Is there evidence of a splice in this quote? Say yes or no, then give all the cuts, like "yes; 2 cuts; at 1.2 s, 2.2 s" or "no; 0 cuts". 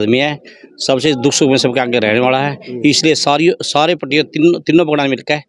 no; 0 cuts